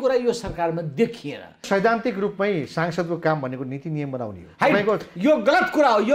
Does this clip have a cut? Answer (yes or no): yes